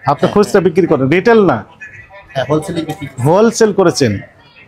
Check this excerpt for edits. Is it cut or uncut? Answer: uncut